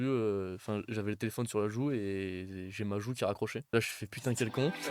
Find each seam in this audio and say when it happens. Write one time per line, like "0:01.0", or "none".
0:03.7